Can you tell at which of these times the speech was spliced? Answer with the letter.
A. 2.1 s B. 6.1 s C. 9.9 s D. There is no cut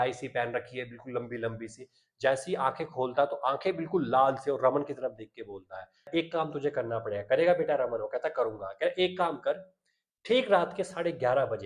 B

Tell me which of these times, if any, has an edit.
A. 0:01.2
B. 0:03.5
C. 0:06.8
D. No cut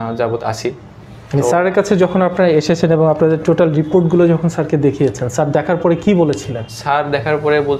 D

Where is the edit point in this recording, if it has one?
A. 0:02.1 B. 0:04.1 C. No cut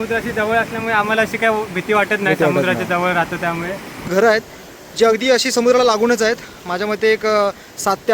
B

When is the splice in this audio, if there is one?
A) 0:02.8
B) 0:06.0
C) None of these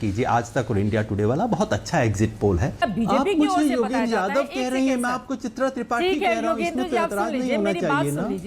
A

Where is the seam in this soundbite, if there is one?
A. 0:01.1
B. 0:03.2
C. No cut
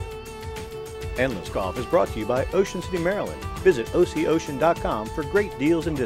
A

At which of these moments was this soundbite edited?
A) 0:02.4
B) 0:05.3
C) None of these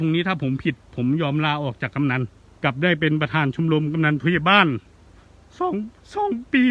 A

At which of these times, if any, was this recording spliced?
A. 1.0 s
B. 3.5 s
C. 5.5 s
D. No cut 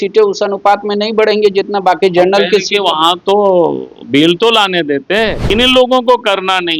C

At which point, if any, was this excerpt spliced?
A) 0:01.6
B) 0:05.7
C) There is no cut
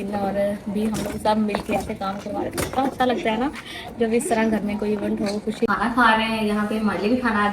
B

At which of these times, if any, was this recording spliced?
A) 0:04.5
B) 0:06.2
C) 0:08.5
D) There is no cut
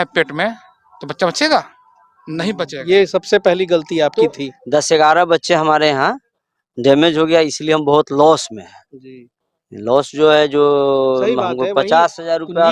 A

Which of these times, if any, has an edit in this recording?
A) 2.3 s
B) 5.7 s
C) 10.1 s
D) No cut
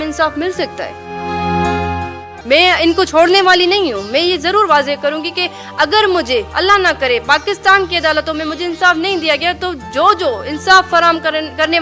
A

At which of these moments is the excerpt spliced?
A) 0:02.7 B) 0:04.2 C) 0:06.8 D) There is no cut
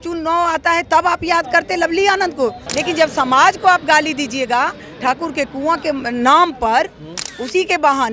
A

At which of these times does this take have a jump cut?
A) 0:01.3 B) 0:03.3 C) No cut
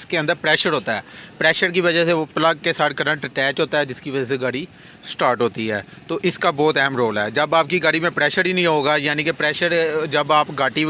C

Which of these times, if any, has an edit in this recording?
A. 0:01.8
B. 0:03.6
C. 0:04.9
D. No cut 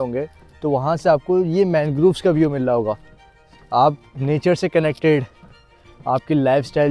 D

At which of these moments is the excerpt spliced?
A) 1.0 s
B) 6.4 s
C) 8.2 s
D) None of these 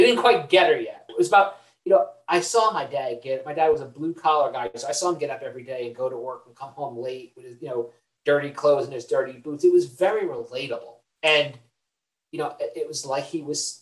A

